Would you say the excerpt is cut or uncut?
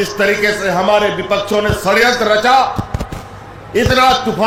uncut